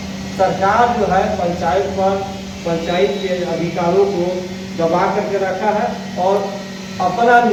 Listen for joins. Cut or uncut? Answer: uncut